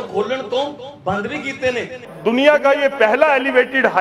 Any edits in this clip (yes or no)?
yes